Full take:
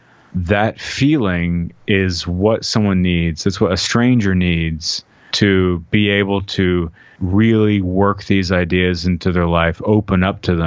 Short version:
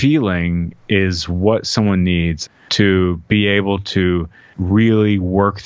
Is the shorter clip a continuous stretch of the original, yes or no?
no